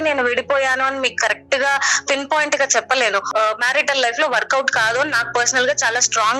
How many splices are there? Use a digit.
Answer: 1